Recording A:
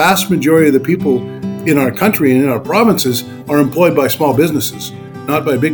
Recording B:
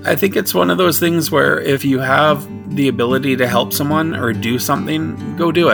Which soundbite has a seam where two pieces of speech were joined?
B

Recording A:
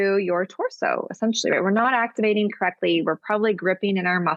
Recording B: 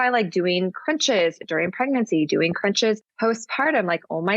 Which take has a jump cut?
B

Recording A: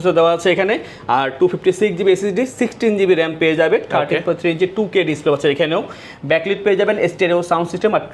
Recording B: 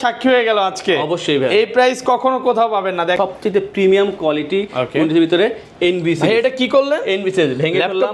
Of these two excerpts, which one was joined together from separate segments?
B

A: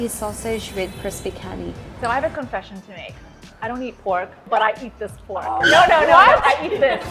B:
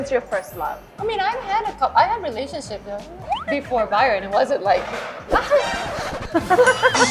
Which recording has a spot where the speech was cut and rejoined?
B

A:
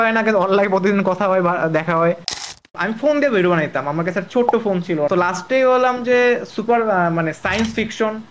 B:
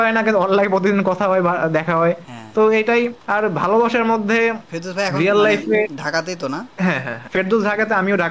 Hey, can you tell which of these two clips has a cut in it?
A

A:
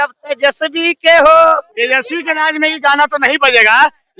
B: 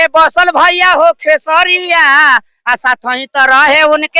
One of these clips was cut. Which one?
A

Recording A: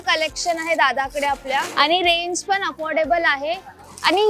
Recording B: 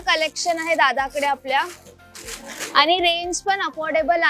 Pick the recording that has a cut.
A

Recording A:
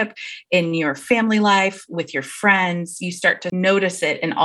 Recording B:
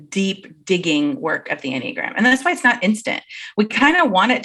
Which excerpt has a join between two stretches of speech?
A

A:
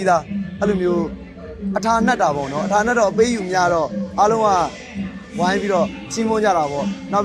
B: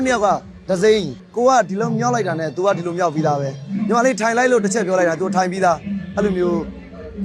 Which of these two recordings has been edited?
B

